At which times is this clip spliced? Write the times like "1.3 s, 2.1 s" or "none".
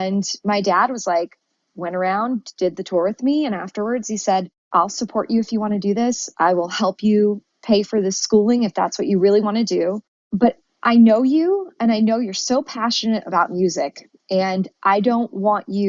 4.6 s, 10.3 s